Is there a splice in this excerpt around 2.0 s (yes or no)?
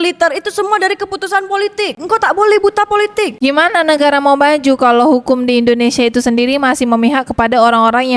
yes